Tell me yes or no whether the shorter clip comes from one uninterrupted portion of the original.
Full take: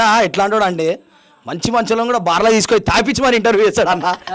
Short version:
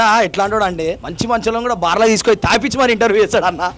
no